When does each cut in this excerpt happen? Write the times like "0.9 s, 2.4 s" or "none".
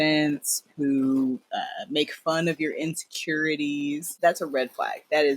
4.2 s